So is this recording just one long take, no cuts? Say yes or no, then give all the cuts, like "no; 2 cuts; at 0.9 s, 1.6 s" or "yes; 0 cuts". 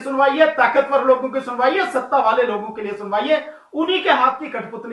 yes; 0 cuts